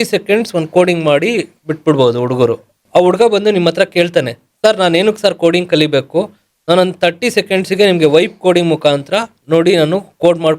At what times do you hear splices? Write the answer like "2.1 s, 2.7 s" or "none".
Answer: 2.8 s